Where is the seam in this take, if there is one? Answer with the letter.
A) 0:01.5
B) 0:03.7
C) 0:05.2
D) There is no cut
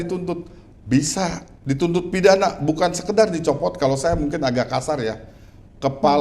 A